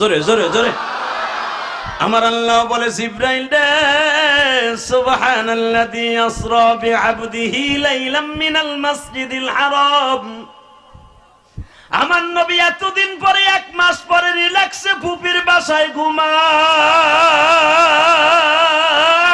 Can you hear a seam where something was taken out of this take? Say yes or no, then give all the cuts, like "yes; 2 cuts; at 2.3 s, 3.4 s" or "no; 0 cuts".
no; 0 cuts